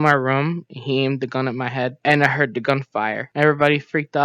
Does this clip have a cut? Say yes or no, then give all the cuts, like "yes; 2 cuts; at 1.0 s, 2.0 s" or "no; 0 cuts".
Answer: yes; 1 cut; at 3.3 s